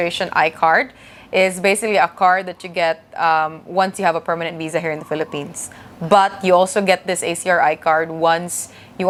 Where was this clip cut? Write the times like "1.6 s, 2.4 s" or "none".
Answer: none